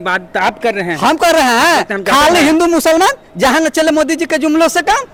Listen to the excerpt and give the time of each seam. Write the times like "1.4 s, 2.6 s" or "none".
none